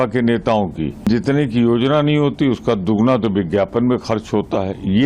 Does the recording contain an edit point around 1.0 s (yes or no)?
yes